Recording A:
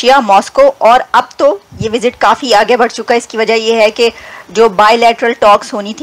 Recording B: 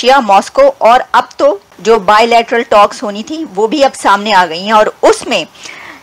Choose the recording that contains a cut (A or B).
B